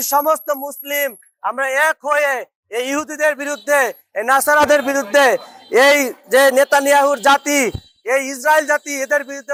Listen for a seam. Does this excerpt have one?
no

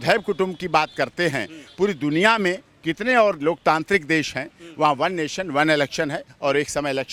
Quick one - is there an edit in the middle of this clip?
no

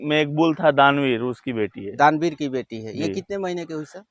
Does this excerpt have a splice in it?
no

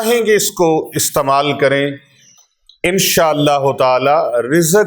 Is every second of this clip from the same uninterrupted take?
yes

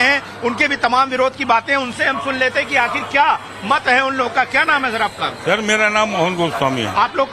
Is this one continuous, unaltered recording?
no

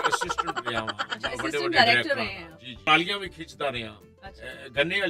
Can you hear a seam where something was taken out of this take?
yes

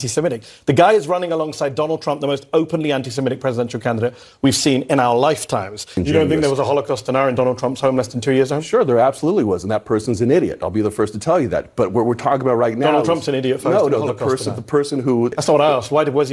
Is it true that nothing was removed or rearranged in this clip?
no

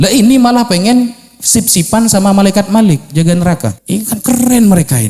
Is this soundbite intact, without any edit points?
no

